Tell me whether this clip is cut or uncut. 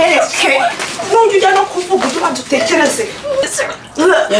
cut